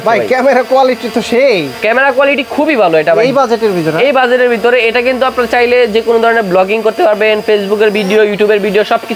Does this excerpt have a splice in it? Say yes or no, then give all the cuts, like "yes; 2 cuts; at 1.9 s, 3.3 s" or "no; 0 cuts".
no; 0 cuts